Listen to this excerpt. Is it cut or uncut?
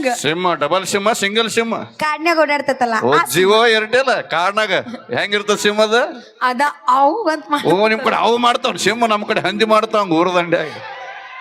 uncut